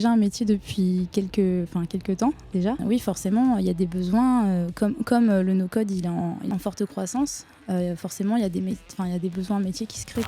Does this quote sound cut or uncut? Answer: cut